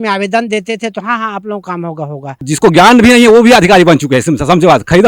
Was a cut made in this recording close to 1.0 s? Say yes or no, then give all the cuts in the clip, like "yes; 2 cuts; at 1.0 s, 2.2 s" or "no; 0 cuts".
no; 1 cut; at 2.5 s